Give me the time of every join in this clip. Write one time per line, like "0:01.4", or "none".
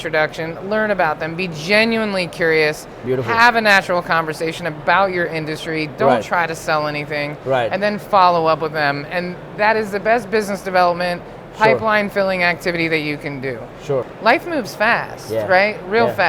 0:14.1